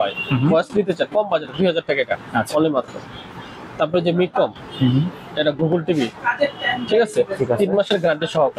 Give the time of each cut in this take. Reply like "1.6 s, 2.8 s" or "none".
none